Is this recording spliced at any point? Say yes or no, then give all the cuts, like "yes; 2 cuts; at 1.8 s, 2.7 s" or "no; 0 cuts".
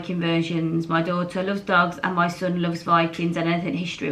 no; 0 cuts